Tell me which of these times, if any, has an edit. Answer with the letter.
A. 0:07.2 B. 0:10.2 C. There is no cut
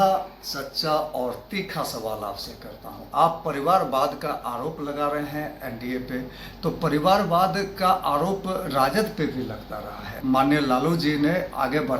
B